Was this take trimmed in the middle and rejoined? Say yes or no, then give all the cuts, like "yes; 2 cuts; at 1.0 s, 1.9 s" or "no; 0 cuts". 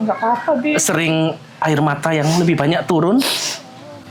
no; 0 cuts